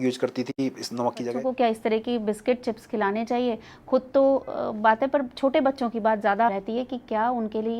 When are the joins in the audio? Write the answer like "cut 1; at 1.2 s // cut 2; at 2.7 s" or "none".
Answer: cut 1; at 1.3 s